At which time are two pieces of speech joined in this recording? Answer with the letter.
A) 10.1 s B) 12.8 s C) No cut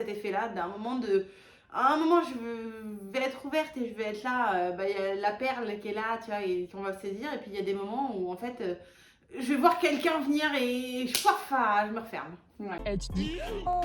B